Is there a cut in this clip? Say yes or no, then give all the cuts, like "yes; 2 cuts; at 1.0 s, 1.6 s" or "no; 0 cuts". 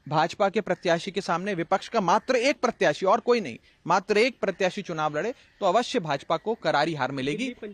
no; 0 cuts